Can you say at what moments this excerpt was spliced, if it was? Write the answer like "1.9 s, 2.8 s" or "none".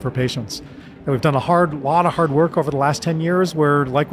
none

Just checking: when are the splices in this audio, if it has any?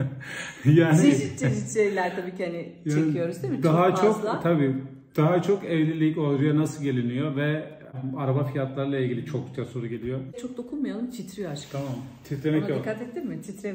7.9 s, 10.4 s

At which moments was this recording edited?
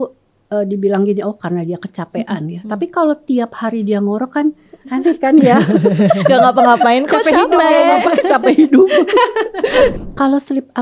9.9 s

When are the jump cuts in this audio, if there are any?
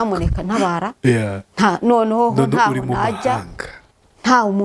none

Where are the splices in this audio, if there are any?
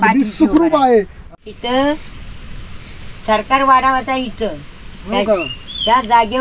1.1 s

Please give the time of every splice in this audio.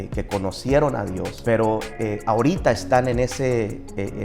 1.3 s

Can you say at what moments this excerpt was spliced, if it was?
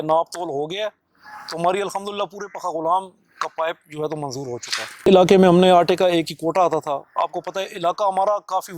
5.0 s

